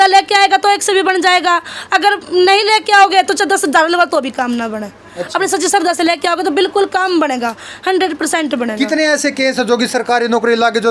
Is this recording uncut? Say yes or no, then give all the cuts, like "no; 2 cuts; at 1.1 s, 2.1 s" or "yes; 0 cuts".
yes; 0 cuts